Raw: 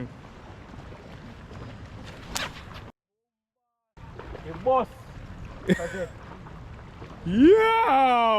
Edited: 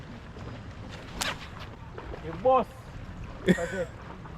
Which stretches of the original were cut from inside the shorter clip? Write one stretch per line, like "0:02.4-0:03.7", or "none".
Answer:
0:02.9-0:04.0